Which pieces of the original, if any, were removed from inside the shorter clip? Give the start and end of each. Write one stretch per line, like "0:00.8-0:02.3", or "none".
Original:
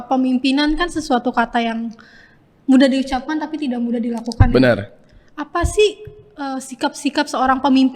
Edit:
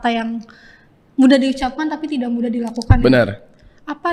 none